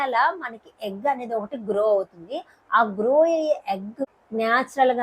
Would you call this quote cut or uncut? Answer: cut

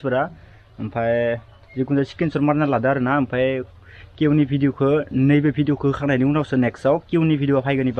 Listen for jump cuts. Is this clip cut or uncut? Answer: uncut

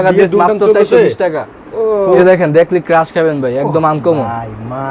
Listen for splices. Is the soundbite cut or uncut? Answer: cut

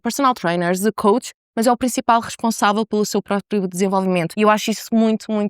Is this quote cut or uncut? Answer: cut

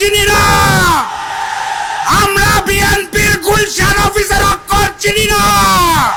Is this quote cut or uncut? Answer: uncut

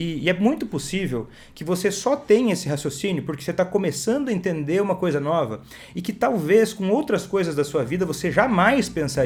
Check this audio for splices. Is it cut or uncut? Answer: uncut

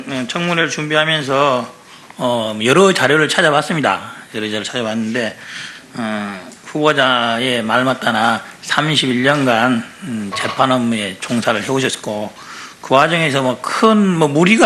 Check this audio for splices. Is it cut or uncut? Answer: uncut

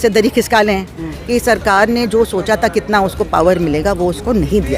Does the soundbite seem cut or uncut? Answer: cut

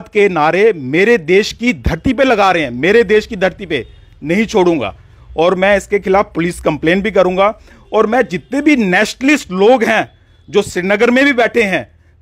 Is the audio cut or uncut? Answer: uncut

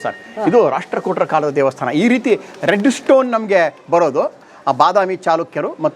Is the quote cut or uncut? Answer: uncut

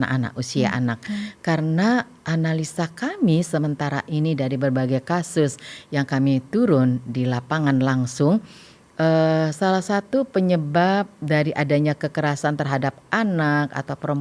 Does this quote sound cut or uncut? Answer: uncut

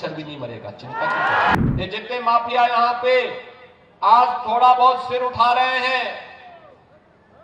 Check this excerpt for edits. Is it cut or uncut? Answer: cut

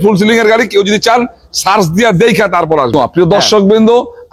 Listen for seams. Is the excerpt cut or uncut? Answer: cut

